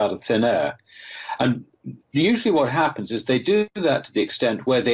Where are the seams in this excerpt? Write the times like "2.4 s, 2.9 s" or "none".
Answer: none